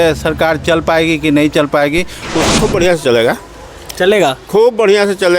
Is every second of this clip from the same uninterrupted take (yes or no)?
no